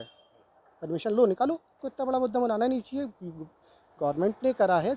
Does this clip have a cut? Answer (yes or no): yes